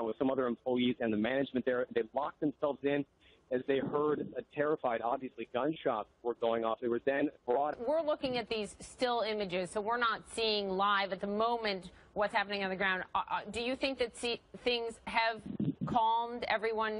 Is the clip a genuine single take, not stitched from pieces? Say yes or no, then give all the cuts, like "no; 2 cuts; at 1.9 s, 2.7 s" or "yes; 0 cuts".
yes; 0 cuts